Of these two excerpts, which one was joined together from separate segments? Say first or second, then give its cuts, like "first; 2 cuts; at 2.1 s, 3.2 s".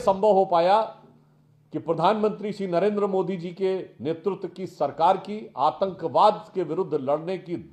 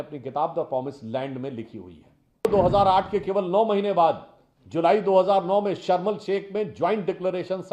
second; 1 cut; at 2.5 s